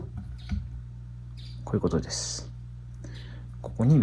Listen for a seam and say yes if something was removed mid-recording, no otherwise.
no